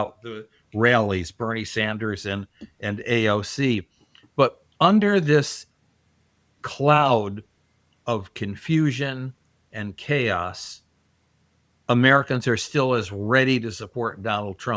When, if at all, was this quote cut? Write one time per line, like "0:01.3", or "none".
none